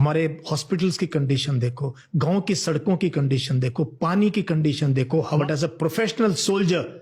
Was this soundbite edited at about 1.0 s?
no; 1 cut; at 5.3 s

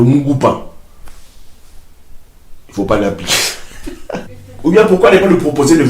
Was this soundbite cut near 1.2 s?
no; 1 cut; at 4.4 s

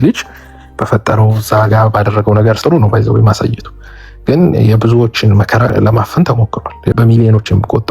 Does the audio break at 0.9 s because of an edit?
no; 3 cuts; at 2.6 s, 5.7 s, 6.9 s

